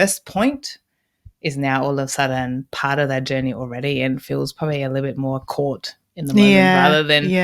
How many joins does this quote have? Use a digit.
0